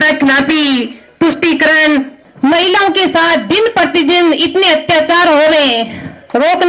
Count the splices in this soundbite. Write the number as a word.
one